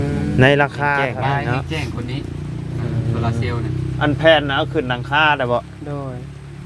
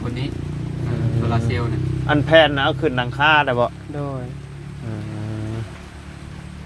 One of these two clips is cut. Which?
first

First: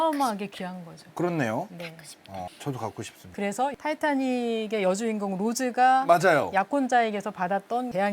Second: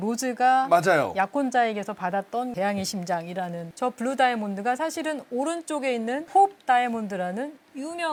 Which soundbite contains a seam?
first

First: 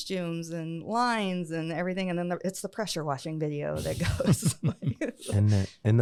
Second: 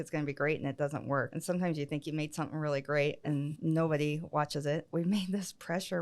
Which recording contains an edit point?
second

